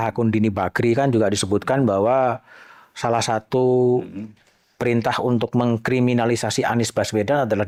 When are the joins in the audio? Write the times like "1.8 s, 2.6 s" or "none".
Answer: none